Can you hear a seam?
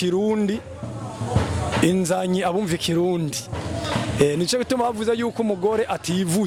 no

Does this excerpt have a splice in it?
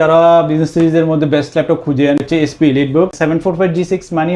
yes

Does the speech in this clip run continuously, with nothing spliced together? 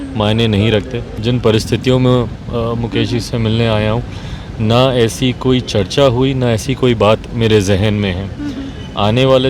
no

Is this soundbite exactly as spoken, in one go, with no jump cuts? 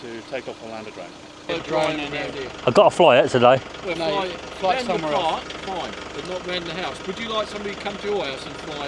no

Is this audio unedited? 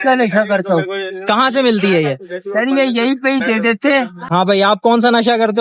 no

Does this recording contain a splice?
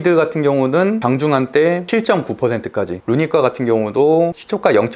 yes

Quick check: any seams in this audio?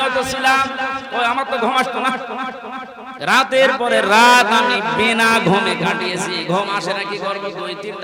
no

